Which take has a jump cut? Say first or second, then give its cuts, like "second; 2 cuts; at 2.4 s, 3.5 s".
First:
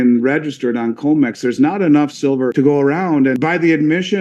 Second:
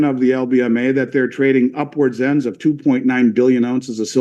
first; 2 cuts; at 2.5 s, 3.3 s